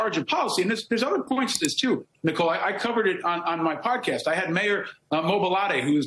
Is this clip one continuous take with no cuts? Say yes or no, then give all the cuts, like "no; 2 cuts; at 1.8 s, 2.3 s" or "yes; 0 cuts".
no; 1 cut; at 1.3 s